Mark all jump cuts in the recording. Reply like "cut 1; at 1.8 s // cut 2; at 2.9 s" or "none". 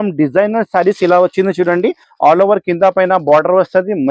cut 1; at 2.1 s